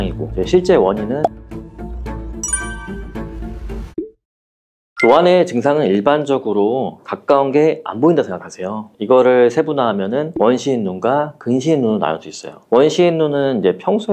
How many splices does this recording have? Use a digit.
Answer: 1